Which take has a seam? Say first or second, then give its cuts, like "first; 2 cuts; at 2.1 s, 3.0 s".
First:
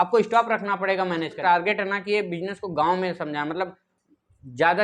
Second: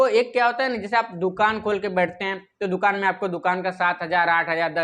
first; 1 cut; at 1.4 s